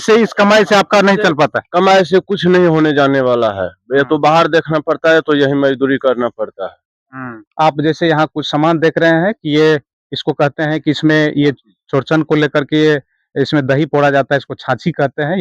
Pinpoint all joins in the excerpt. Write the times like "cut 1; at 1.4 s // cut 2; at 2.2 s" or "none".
cut 1; at 7.4 s